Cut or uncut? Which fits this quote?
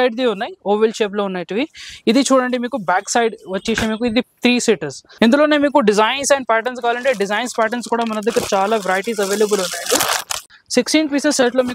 cut